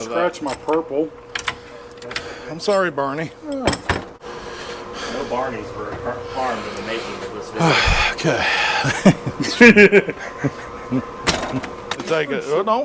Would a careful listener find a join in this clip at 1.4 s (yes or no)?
no